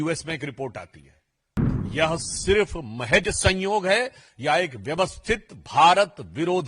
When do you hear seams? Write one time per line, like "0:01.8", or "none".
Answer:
0:01.6